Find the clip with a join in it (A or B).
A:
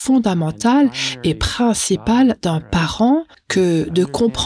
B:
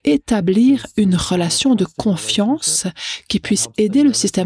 A